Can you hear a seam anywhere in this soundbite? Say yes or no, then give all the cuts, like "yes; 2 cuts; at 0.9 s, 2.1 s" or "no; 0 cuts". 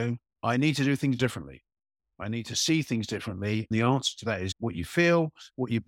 yes; 2 cuts; at 3.7 s, 4.5 s